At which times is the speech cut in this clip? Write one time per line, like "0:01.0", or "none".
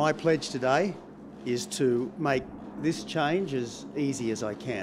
0:01.0